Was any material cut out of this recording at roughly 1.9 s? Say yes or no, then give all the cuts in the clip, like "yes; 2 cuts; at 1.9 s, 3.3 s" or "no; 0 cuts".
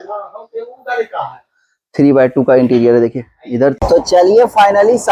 no; 1 cut; at 3.8 s